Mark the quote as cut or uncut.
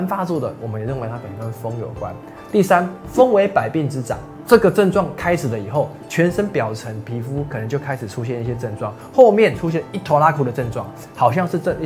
uncut